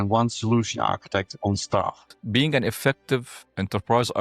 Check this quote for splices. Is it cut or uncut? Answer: cut